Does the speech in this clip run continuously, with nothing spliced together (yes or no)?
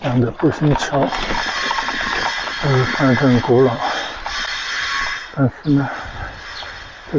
yes